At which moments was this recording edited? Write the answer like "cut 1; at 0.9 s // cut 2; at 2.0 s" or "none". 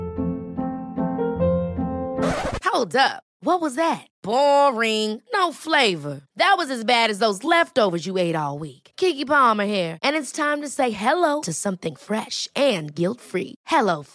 none

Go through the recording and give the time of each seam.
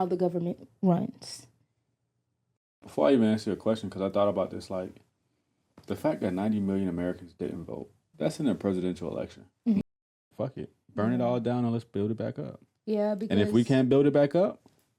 cut 1; at 2.7 s // cut 2; at 8.1 s // cut 3; at 9.8 s

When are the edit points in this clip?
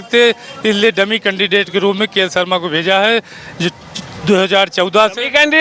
none

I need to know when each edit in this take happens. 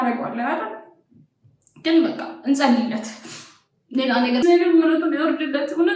cut 1; at 4.4 s

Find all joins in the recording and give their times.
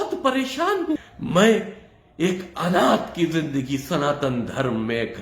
cut 1; at 1.0 s

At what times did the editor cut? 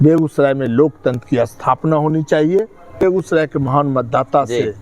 cut 1; at 3.0 s

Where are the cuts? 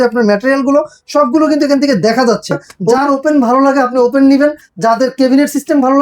cut 1; at 2.7 s

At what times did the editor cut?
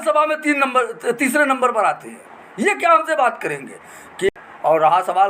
cut 1; at 4.3 s

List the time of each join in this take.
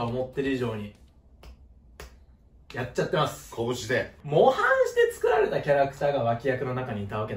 cut 1; at 4.2 s

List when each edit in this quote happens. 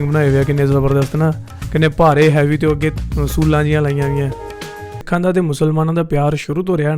cut 1; at 5.1 s

